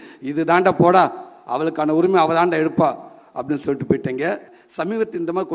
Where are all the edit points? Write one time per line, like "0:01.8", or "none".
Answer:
0:04.6